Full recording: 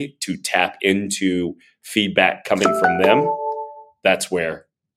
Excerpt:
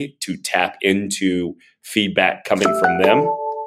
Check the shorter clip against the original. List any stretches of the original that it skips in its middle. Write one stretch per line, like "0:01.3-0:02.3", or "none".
none